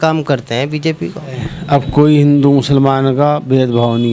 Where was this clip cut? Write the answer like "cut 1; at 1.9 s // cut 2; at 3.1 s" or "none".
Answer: cut 1; at 1.5 s